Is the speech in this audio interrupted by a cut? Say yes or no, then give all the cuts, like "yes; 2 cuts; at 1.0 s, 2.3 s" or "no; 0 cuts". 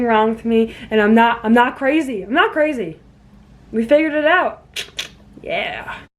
no; 0 cuts